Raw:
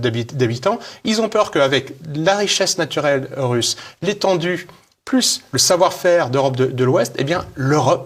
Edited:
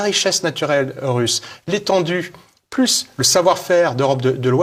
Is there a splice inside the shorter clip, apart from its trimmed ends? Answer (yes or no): no